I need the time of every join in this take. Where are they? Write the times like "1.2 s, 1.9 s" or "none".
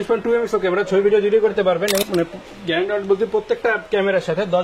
2.1 s